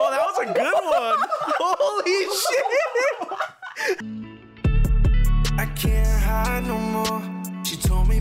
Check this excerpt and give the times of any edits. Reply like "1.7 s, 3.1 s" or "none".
4.0 s